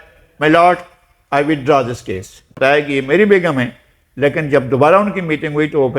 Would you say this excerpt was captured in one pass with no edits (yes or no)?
no